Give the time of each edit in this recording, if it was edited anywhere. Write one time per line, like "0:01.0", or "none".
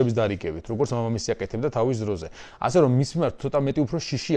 none